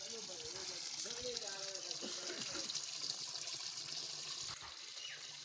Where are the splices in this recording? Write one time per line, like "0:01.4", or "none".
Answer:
0:04.5